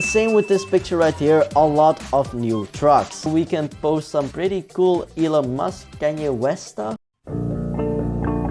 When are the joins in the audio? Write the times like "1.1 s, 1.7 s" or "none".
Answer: 3.3 s